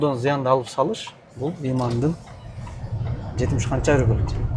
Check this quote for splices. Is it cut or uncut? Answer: uncut